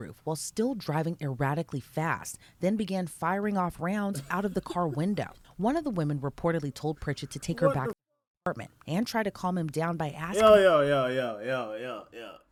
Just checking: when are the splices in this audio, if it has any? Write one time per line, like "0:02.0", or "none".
none

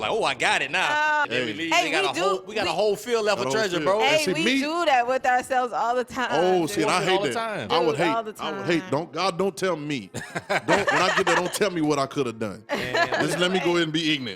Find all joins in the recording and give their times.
0:01.3

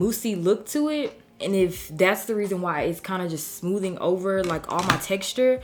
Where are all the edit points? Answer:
none

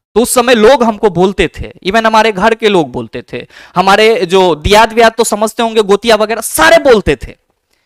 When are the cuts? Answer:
none

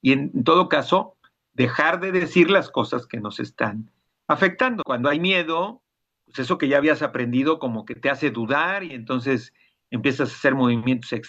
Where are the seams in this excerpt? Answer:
0:04.8

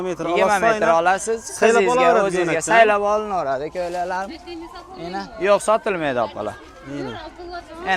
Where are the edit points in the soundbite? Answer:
none

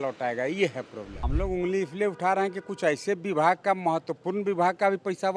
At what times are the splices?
0:01.2

